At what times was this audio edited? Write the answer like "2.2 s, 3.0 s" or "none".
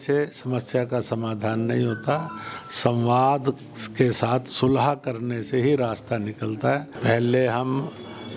6.9 s